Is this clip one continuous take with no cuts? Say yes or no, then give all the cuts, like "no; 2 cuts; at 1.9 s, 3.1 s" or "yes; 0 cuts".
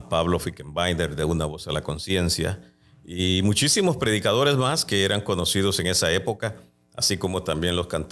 yes; 0 cuts